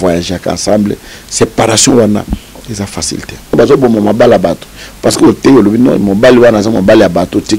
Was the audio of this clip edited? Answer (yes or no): yes